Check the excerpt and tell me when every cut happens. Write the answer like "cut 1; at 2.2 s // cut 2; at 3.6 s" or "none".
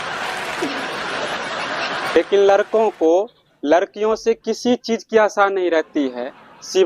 cut 1; at 2.2 s